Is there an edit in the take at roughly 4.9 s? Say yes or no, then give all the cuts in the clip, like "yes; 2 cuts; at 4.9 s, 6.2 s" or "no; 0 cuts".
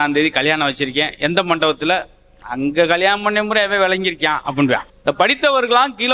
yes; 1 cut; at 4.9 s